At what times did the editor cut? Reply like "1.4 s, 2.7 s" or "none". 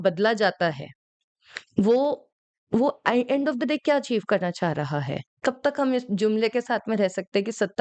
5.2 s